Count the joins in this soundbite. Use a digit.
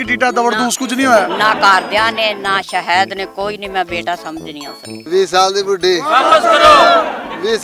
1